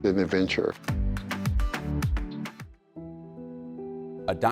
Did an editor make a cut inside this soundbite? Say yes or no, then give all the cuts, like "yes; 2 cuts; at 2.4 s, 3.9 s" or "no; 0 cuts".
yes; 2 cuts; at 0.9 s, 2.6 s